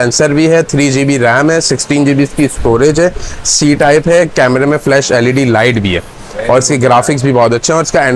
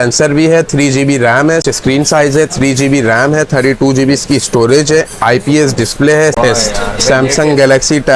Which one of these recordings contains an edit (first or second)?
second